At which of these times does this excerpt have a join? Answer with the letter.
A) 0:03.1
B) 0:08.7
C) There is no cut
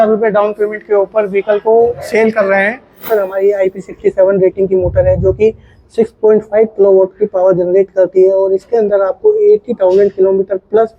A